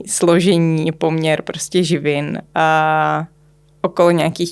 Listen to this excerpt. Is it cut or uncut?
uncut